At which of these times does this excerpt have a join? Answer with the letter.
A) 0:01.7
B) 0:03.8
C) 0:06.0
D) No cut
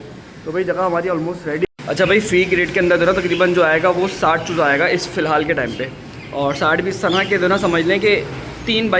A